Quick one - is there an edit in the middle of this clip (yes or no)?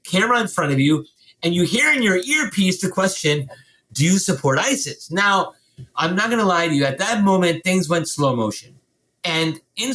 no